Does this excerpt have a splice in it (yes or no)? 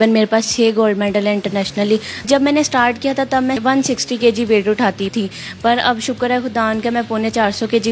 yes